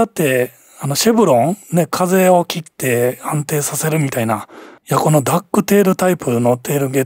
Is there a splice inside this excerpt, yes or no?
yes